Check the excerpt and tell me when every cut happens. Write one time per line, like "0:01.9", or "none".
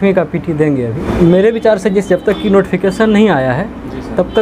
0:01.0